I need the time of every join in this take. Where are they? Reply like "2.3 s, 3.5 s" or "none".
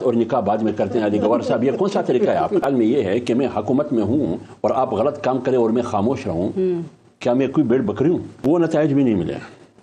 2.6 s, 8.4 s